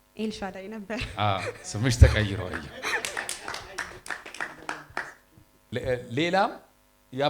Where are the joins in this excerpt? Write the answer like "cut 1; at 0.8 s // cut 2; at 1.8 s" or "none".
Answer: cut 1; at 5.7 s

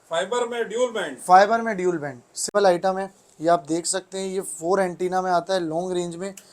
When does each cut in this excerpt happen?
cut 1; at 2.5 s

